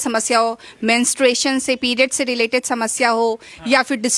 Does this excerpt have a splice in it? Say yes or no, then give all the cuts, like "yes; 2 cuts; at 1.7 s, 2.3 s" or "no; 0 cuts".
no; 0 cuts